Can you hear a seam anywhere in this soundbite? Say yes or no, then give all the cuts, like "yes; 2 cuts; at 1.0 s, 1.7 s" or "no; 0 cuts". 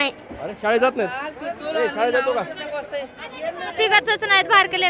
yes; 1 cut; at 3.7 s